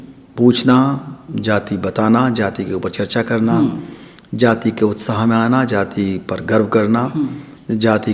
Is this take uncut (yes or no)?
yes